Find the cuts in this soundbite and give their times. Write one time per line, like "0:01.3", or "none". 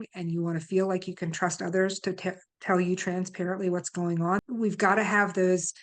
0:04.4